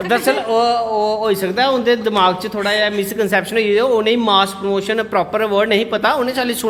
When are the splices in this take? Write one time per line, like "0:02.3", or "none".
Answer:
none